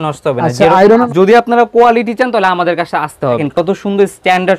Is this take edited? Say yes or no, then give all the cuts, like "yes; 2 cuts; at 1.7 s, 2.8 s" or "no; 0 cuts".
yes; 2 cuts; at 1.0 s, 3.4 s